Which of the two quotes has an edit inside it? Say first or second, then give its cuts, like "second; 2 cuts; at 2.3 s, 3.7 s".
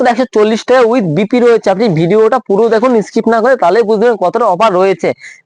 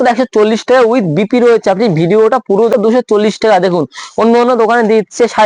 second; 1 cut; at 2.7 s